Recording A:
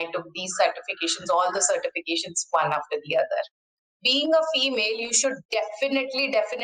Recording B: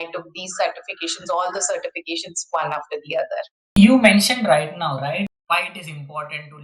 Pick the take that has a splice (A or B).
A